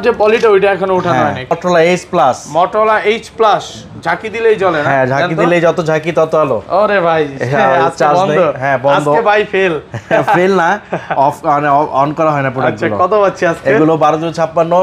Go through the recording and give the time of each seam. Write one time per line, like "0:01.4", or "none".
0:01.5